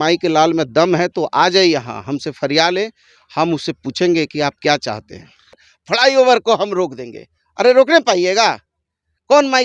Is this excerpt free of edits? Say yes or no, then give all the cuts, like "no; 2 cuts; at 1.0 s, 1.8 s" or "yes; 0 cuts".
no; 1 cut; at 5.7 s